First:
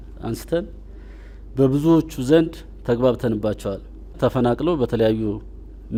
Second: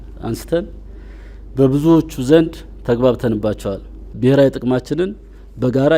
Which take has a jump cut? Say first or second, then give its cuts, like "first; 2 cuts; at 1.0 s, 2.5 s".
second; 1 cut; at 4.1 s